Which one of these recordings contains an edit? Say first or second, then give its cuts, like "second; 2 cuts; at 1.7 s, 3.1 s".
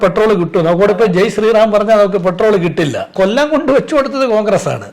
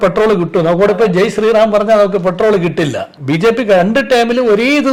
first; 1 cut; at 3.1 s